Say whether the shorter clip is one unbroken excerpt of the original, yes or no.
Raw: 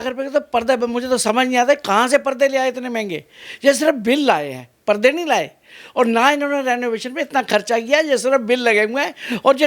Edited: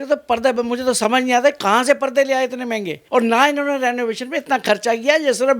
no